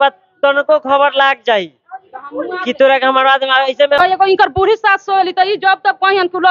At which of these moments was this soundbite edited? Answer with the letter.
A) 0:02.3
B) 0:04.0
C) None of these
B